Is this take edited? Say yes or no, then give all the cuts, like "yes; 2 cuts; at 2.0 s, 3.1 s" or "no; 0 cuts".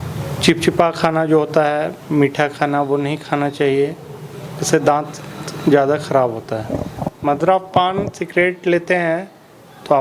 yes; 1 cut; at 7.0 s